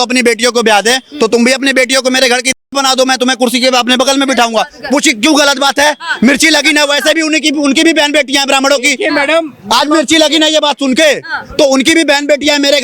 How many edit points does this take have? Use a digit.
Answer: 0